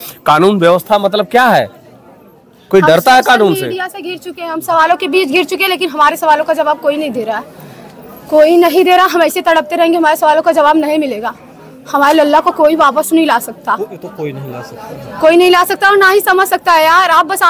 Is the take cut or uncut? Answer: uncut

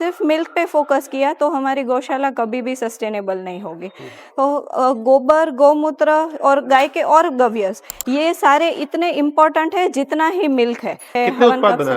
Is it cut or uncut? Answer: cut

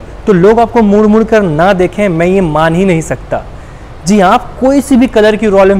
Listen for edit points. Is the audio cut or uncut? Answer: uncut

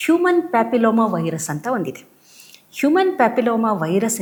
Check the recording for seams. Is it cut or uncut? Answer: uncut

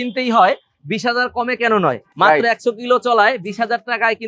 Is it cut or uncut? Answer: uncut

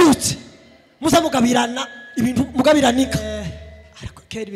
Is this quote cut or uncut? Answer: cut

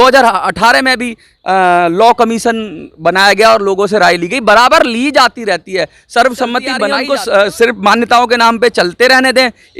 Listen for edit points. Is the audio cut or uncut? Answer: cut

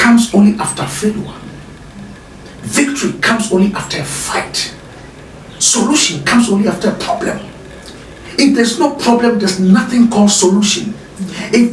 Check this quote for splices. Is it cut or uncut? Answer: uncut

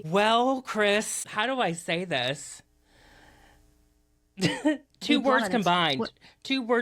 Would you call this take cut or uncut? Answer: uncut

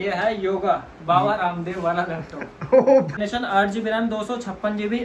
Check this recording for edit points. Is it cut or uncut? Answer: cut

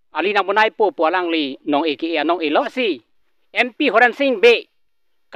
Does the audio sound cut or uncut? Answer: cut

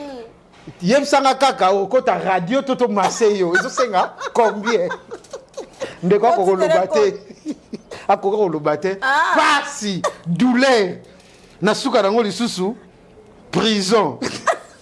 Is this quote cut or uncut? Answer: uncut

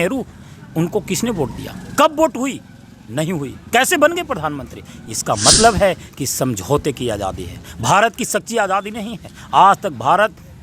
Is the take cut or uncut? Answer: uncut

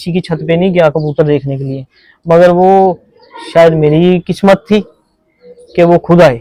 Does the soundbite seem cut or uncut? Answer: uncut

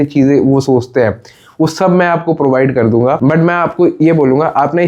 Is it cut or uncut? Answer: uncut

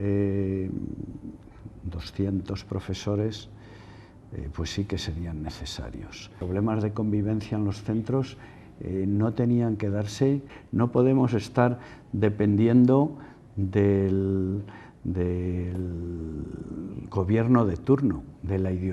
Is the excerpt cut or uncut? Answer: cut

